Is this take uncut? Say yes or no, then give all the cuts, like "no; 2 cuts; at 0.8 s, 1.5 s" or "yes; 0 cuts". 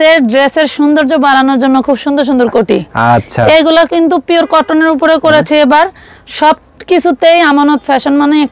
yes; 0 cuts